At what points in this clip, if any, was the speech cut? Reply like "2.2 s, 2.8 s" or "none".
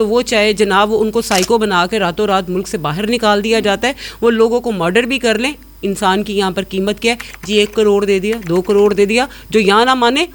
none